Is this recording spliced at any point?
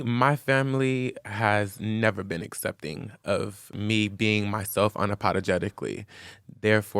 yes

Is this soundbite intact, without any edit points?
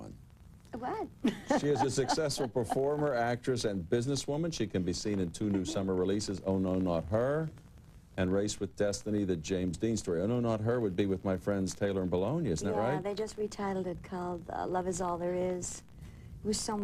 yes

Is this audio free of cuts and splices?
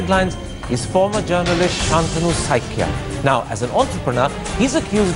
yes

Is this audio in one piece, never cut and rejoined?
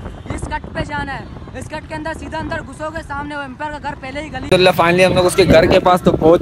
no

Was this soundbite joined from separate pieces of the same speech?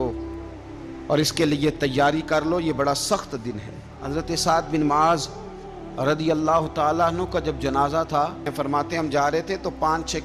yes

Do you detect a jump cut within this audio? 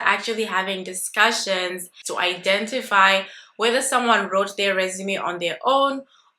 yes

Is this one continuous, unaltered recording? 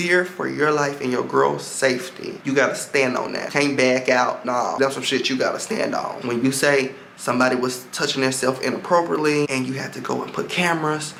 yes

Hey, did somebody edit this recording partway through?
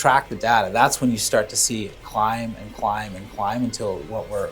no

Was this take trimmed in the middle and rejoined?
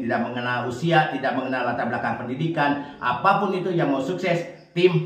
no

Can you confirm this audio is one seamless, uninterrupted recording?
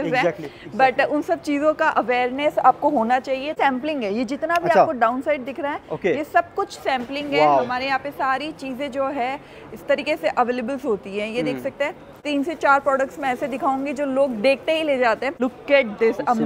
no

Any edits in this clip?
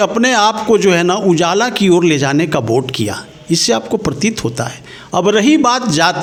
no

